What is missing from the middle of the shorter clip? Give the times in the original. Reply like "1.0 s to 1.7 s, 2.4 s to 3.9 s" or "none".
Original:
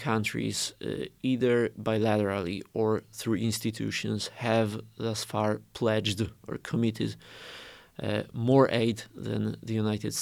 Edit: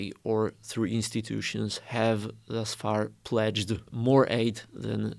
6.4 s to 8.3 s

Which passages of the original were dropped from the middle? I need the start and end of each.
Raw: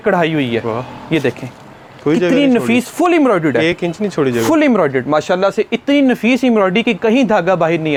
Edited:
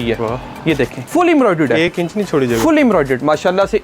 1.5 s to 2.9 s

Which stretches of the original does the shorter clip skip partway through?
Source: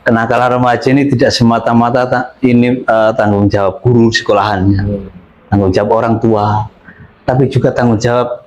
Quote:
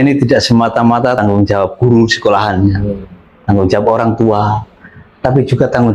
2.1 s to 3.2 s

